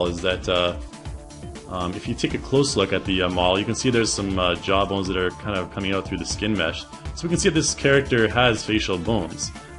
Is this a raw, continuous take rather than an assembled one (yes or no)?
yes